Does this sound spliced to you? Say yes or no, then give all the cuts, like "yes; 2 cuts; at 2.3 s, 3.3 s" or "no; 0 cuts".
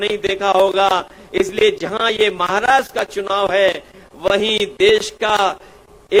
no; 0 cuts